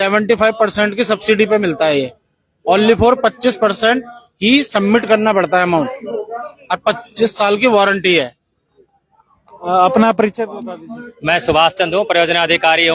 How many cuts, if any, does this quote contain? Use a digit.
0